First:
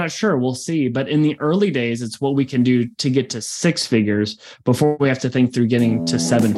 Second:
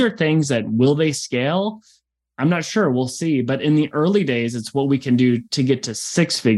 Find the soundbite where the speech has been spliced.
first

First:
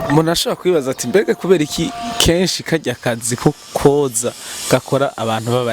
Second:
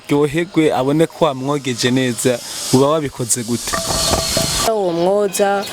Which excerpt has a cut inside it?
second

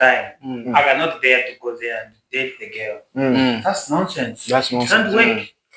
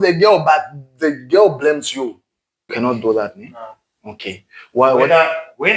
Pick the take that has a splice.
second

